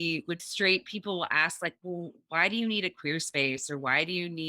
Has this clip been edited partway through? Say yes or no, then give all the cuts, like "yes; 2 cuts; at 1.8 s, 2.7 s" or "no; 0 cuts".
no; 0 cuts